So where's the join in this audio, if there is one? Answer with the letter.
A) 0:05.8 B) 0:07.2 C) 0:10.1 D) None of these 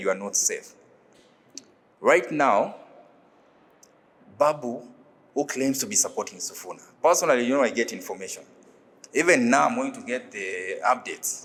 D